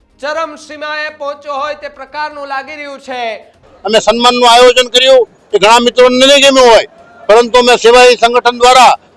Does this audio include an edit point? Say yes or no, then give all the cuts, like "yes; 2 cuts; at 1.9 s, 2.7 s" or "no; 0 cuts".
yes; 1 cut; at 3.7 s